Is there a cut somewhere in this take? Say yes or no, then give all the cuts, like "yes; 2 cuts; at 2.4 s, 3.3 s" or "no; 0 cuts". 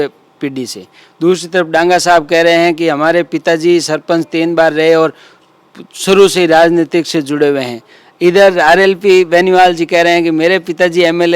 no; 0 cuts